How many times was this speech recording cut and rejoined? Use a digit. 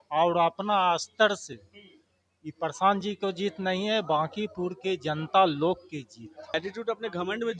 1